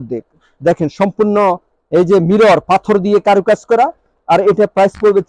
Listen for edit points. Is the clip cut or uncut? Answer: uncut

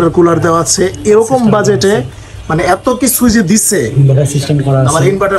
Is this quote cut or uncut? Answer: uncut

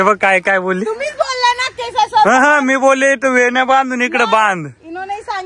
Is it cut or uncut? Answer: uncut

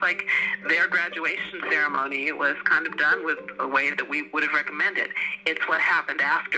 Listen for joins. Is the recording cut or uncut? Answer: cut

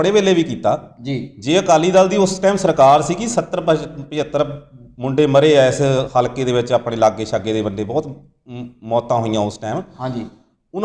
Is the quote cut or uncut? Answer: uncut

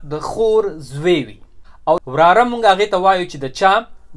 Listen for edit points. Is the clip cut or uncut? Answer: cut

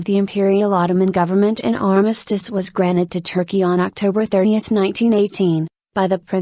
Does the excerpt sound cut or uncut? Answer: uncut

